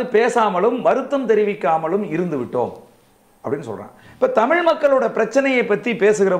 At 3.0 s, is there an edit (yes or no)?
no